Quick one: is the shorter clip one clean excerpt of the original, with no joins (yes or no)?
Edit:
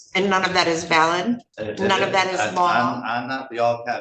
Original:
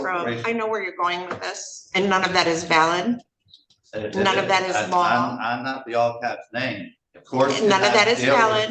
no